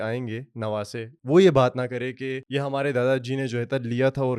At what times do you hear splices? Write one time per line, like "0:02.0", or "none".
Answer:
0:01.1
0:02.4